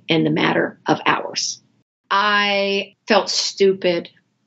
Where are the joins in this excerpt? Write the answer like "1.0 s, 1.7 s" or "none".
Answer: 2.0 s, 2.9 s